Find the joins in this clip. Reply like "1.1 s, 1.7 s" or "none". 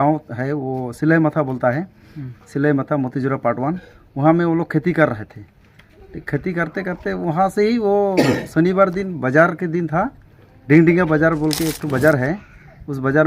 none